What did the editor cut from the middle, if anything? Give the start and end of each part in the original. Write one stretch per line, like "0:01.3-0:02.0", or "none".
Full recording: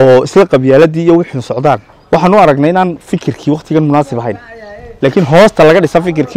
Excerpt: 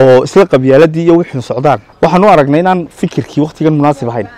0:01.9-0:02.0